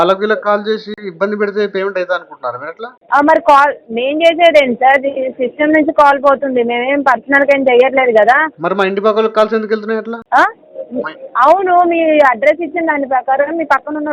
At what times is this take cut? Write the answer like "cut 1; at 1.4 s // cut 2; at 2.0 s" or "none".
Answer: cut 1; at 1.0 s